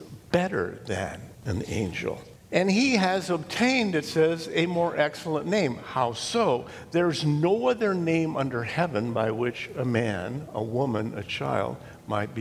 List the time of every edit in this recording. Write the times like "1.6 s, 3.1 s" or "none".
1.3 s, 2.3 s